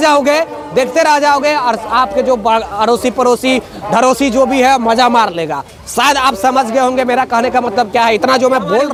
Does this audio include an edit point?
no; 0 cuts

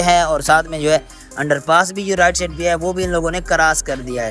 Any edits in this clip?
no; 0 cuts

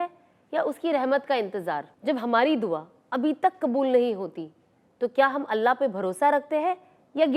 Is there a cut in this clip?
yes; 1 cut; at 1.9 s

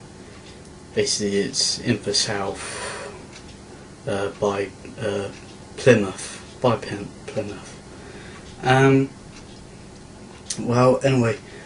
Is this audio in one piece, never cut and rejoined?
no; 1 cut; at 4.1 s

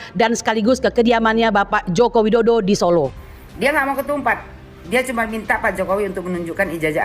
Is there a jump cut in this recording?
yes; 1 cut; at 3.1 s

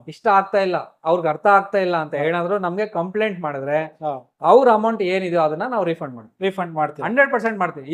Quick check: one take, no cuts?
yes; 0 cuts

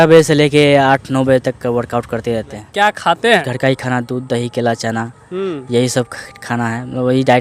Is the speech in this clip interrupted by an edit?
yes; 2 cuts; at 2.6 s, 3.5 s

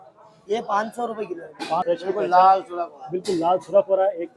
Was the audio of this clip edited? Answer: yes; 1 cut; at 1.8 s

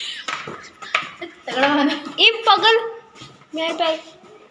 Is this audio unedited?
yes; 0 cuts

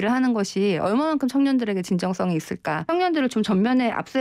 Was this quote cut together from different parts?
yes; 1 cut; at 2.8 s

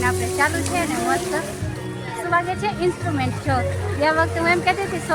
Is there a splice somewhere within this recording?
no; 0 cuts

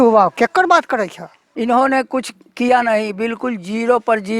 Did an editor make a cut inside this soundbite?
yes; 1 cut; at 1.4 s

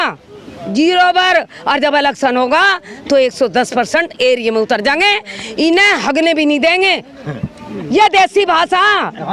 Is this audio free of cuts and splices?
yes; 0 cuts

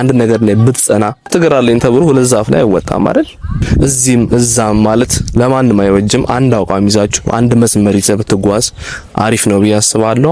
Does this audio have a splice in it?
yes; 2 cuts; at 1.3 s, 3.6 s

